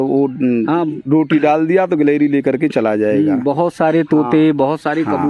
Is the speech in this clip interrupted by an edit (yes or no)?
no